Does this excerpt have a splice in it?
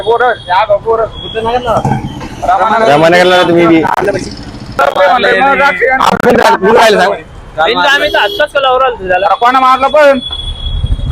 yes; 1 cut; at 4.8 s

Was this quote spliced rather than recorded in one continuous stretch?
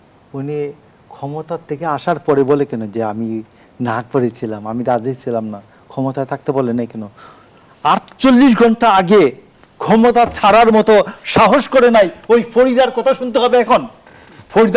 no; 0 cuts

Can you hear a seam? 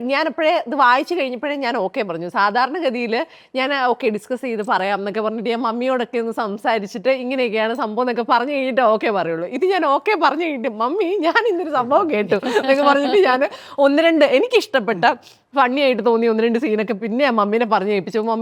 no; 0 cuts

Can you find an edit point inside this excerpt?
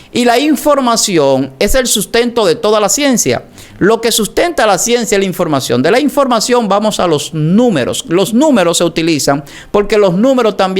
no; 0 cuts

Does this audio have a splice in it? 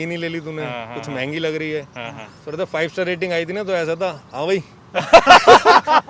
no; 0 cuts

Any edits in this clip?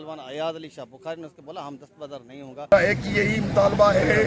yes; 1 cut; at 2.7 s

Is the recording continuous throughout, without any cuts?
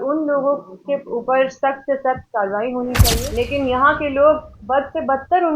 no; 1 cut; at 3.3 s

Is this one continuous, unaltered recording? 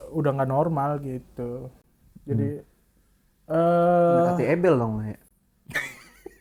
yes; 0 cuts

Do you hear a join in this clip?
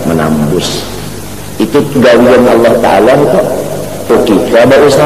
yes; 1 cut; at 4.1 s

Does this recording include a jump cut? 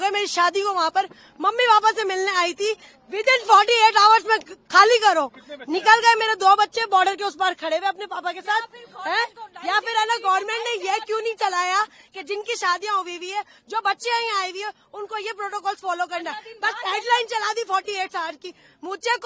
no; 0 cuts

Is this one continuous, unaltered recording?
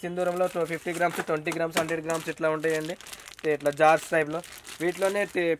yes; 0 cuts

